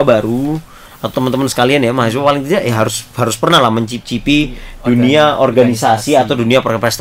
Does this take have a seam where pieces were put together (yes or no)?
no